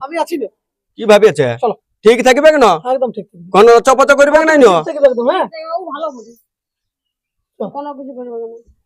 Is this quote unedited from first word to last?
yes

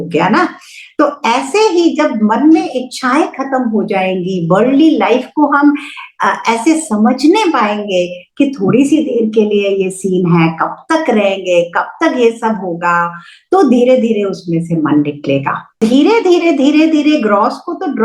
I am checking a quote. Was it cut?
yes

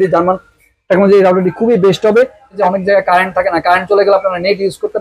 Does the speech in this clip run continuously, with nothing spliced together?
no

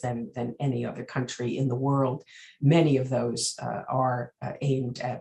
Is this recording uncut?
yes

